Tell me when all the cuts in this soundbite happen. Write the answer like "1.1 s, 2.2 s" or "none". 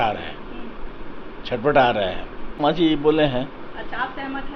2.6 s